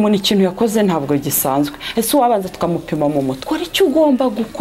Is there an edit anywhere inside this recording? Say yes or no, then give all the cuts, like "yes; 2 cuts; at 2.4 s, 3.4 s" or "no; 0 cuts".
yes; 1 cut; at 3.4 s